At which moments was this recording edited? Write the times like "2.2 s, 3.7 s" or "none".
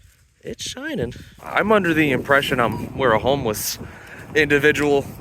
1.3 s